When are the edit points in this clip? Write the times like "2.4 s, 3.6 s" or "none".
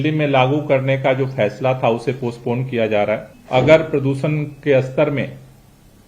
3.3 s